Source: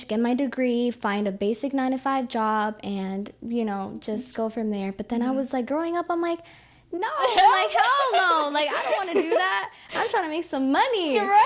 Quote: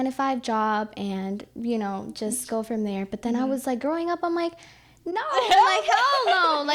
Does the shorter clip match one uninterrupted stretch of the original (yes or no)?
yes